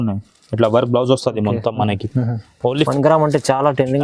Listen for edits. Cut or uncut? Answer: cut